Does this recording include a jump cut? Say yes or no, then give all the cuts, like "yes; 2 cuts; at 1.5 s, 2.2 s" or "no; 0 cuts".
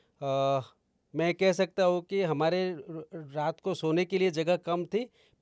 no; 0 cuts